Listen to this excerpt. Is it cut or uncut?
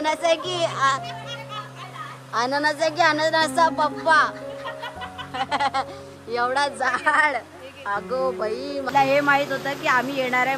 cut